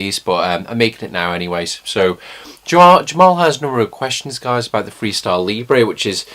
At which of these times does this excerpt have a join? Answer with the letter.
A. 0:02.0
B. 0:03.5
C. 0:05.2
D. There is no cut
C